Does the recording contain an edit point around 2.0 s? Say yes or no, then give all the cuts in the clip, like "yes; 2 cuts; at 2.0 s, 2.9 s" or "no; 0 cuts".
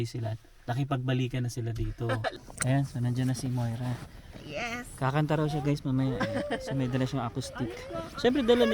yes; 1 cut; at 2.0 s